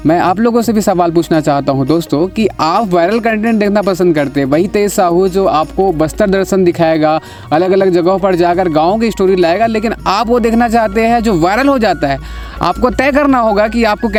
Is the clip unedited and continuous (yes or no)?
yes